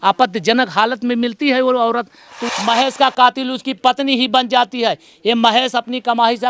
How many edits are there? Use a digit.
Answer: 1